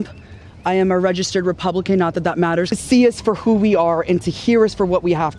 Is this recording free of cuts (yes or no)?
no